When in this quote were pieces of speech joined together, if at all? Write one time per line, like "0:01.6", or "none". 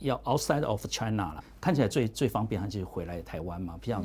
0:01.4